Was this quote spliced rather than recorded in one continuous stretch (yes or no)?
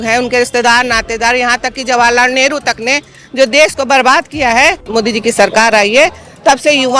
yes